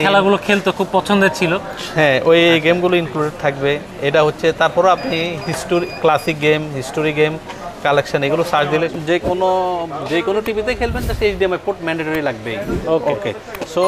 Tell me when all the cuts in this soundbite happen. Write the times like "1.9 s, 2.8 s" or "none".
8.9 s